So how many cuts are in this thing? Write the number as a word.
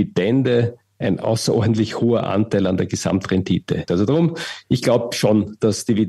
one